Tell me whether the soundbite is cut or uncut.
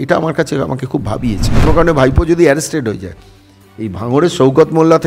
cut